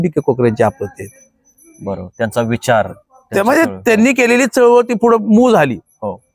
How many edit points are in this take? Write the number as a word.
zero